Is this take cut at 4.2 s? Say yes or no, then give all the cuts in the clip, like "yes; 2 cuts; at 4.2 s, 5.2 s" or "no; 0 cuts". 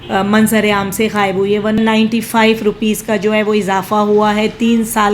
no; 1 cut; at 1.8 s